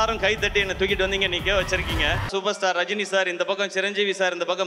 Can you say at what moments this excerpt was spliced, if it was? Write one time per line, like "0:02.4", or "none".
0:02.3